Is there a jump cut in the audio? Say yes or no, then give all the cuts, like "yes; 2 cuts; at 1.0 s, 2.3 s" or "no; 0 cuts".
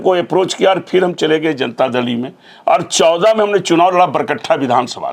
no; 0 cuts